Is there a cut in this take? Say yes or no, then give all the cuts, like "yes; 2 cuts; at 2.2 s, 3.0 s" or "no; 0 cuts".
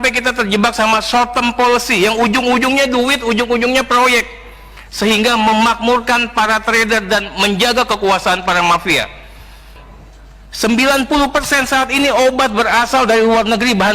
yes; 1 cut; at 9.8 s